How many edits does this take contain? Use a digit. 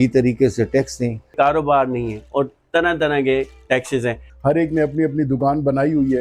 2